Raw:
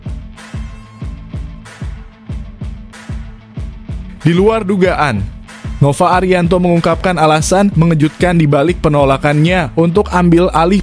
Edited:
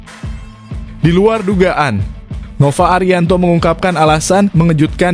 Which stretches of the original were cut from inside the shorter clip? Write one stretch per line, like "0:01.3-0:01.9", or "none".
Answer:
0:01.3-0:04.2